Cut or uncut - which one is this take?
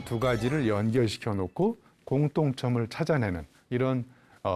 uncut